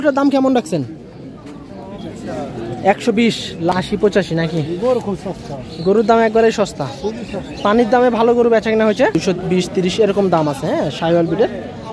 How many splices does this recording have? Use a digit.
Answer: 2